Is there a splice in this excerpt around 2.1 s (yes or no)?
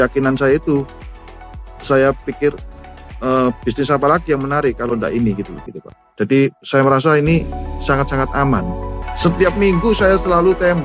no